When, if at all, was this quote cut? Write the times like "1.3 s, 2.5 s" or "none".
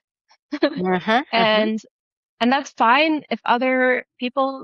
none